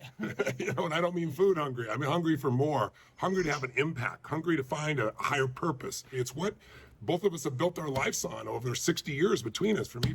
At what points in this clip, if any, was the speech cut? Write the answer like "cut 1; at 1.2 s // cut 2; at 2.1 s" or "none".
cut 1; at 1.6 s

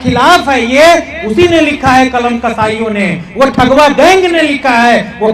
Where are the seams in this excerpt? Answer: none

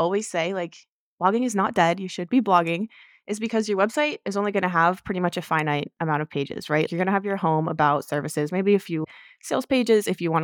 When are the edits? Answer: cut 1; at 6.9 s // cut 2; at 9.0 s

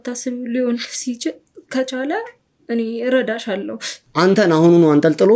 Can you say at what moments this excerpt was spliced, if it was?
cut 1; at 4.3 s

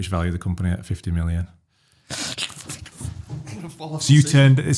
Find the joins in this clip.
none

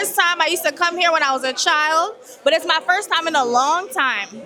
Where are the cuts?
none

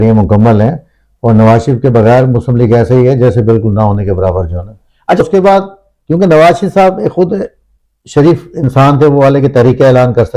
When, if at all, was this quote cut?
cut 1; at 5.2 s

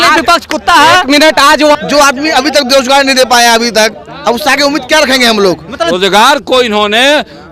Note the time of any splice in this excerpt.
cut 1; at 1.7 s // cut 2; at 5.9 s

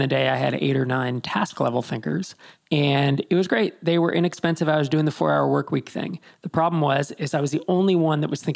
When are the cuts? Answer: none

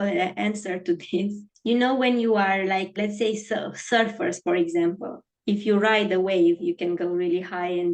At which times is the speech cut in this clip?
cut 1; at 1.5 s // cut 2; at 3.0 s

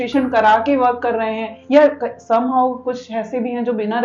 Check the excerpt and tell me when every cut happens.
none

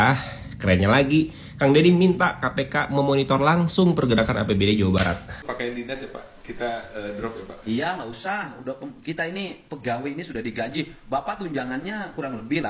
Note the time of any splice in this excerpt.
cut 1; at 5.4 s

